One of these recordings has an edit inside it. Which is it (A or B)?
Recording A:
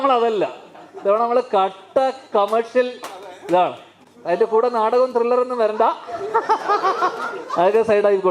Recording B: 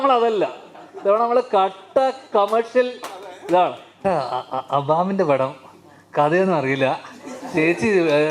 B